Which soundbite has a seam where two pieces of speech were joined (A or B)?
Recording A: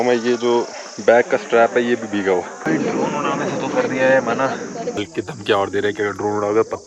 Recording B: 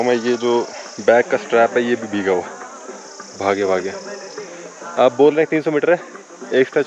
A